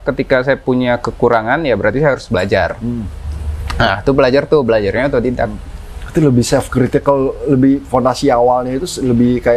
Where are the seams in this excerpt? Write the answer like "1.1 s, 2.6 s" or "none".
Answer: none